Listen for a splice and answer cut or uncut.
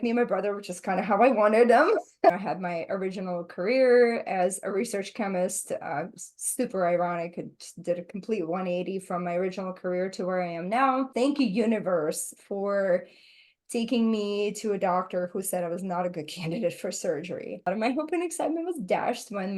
cut